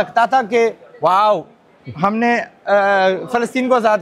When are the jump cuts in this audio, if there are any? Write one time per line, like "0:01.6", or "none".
none

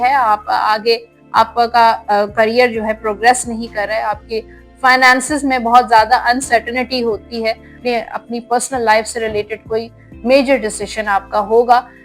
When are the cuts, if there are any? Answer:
0:07.7

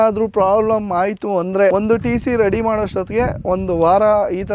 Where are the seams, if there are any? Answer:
0:01.7

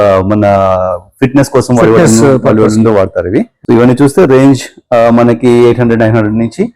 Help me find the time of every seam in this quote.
0:03.5

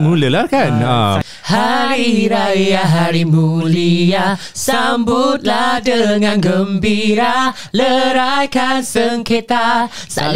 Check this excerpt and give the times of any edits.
0:01.2

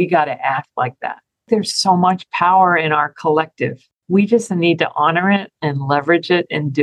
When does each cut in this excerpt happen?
0:01.3

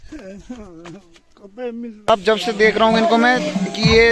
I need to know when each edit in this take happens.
0:02.1

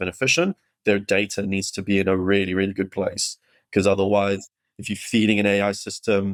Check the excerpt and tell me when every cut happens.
none

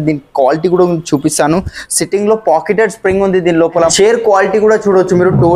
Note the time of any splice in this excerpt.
0:03.9

